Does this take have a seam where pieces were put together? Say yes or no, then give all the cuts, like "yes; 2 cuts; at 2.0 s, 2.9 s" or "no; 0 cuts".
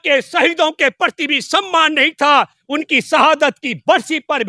no; 0 cuts